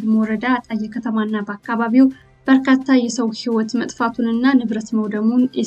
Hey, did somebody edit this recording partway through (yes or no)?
yes